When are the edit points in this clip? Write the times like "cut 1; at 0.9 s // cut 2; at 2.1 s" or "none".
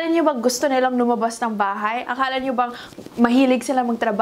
none

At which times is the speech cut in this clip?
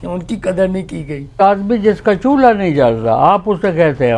cut 1; at 1.4 s

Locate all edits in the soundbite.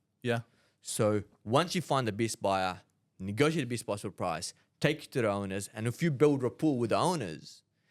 none

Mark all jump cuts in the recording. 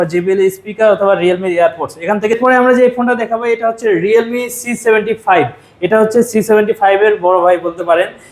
cut 1; at 2.3 s

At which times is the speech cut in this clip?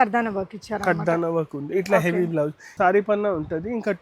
cut 1; at 2.6 s

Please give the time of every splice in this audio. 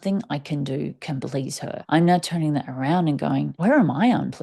cut 1; at 1.8 s // cut 2; at 3.5 s

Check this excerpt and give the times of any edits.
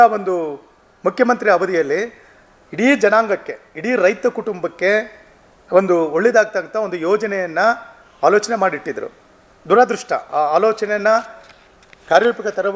none

